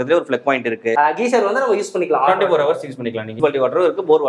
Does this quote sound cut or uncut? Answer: cut